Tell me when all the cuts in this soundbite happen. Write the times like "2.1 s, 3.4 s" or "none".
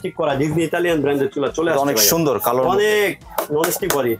none